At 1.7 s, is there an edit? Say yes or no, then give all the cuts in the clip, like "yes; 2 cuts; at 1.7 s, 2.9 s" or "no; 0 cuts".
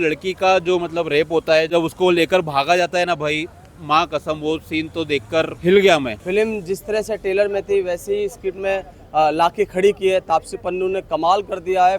yes; 3 cuts; at 1.7 s, 5.5 s, 6.2 s